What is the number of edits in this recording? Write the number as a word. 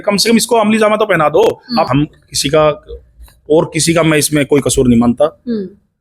one